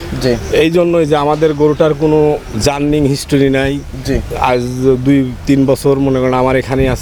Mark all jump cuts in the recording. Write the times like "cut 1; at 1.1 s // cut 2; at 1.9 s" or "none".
none